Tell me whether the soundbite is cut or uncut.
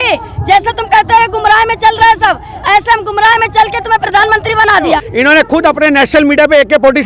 cut